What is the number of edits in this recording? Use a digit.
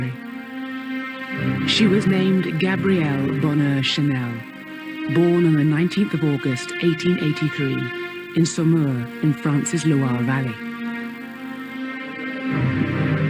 1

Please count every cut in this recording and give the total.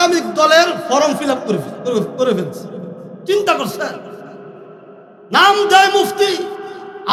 0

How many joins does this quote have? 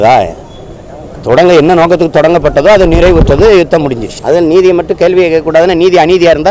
1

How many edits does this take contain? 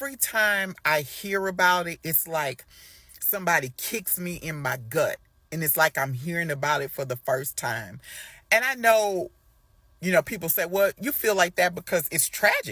0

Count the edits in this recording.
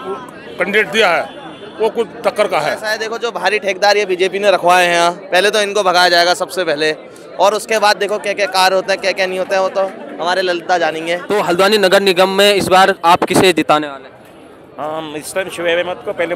2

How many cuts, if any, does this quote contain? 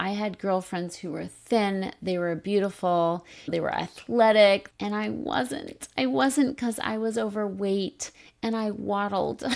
2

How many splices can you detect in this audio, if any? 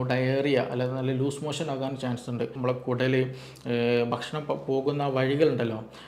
1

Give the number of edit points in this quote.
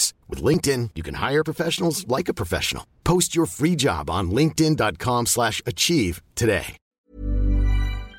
1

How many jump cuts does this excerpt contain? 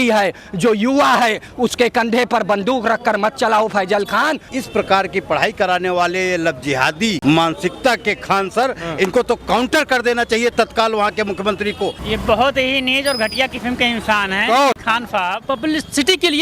5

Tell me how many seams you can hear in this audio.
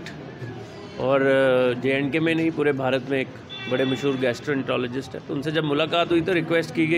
0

